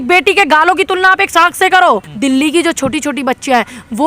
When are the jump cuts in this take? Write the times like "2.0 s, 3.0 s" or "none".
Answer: 2.1 s